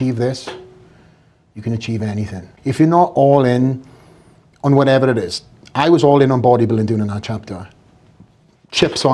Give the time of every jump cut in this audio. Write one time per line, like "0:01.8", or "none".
0:02.6